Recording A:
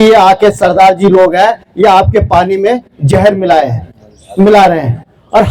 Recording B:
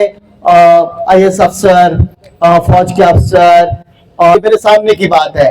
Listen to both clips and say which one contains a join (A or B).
B